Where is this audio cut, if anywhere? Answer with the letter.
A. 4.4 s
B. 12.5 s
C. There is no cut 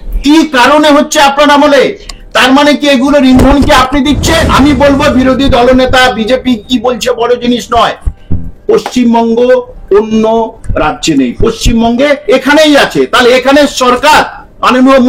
A